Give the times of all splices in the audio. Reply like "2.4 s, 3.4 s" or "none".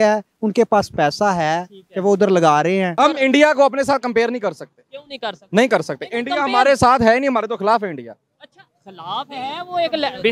2.9 s